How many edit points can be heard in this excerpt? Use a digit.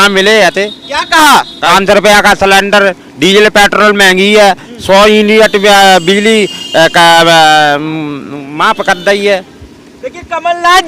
1